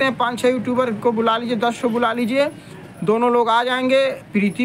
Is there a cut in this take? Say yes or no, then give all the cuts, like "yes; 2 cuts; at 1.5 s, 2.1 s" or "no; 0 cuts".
no; 0 cuts